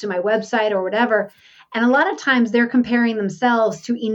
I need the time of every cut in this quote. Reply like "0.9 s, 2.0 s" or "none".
none